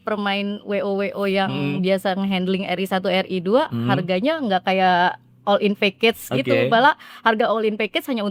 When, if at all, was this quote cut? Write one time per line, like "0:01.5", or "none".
none

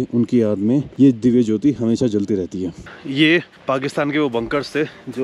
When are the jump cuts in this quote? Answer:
none

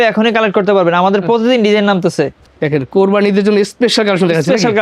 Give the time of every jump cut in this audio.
0:02.4

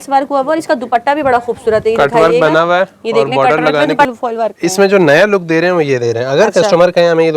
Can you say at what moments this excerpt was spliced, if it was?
0:04.1

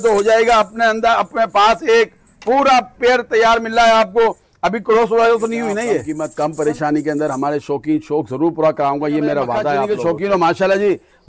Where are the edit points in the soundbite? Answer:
0:06.1
0:09.8

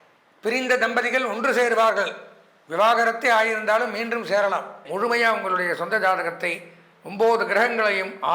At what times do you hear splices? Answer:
0:04.8

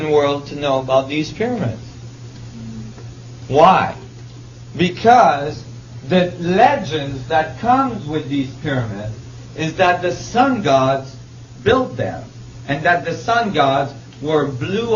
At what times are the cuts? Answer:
0:02.1

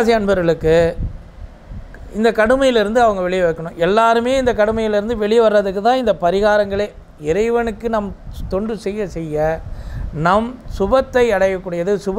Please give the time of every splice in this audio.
none

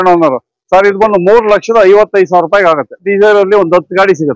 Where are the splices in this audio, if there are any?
0:03.0

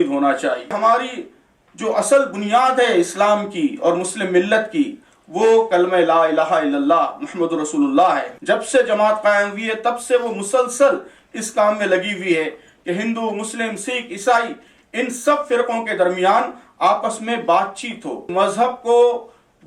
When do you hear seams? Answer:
0:00.7
0:08.3
0:18.1

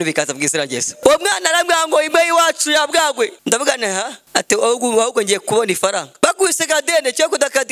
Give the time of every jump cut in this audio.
0:00.9
0:03.4
0:04.2
0:06.1

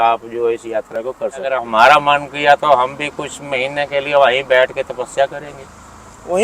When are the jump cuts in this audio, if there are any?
0:01.6

